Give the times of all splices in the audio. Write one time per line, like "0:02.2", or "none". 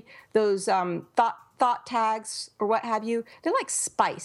none

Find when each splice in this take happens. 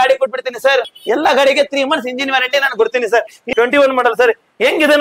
0:00.9
0:03.5

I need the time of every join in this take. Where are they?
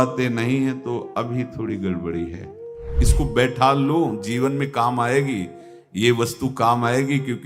0:03.0

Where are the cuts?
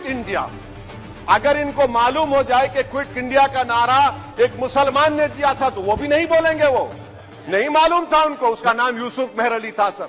0:08.6

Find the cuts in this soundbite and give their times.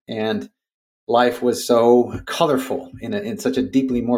0:02.2

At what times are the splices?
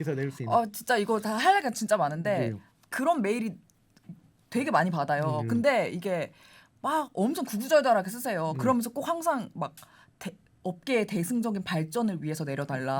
none

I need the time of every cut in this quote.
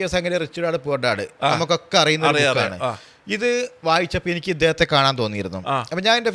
none

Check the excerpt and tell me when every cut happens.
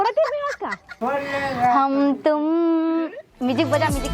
0:00.9

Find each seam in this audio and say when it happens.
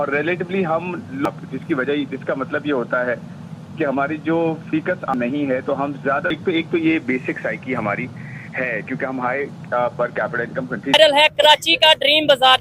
0:01.3
0:05.1
0:06.3
0:10.9

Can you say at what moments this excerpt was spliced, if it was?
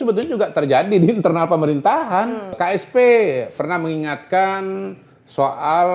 0:02.6

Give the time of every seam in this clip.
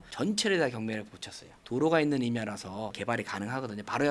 0:02.9

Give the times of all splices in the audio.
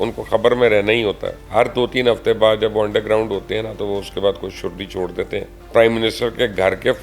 0:01.3
0:05.6

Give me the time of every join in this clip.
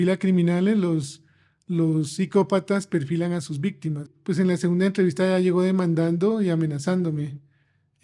0:04.1

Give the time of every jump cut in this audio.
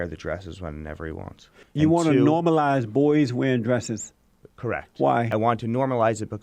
0:01.5
0:05.3

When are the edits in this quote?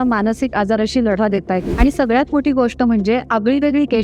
0:01.7

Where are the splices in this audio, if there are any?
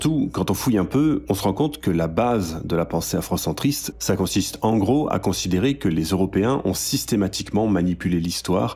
none

